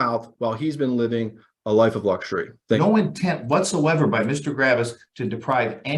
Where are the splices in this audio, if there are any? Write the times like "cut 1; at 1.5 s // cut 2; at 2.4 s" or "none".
cut 1; at 2.8 s